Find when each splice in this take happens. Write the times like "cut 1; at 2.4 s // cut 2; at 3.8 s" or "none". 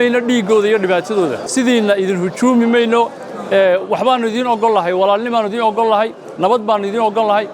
cut 1; at 1.4 s